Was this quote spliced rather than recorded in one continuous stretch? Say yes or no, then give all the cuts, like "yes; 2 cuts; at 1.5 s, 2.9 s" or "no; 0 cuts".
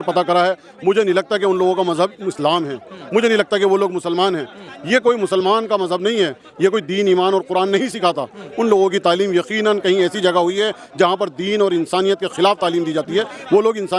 no; 0 cuts